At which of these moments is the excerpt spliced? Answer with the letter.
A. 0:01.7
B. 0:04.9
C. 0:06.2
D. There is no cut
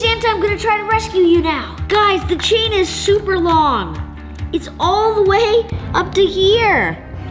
A